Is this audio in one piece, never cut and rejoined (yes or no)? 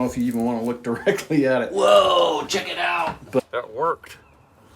no